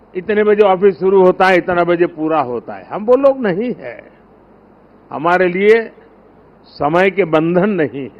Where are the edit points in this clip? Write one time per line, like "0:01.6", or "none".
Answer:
none